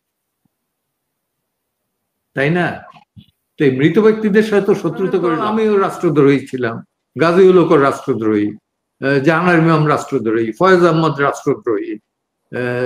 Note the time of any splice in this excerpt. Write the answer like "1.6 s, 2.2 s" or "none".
5.4 s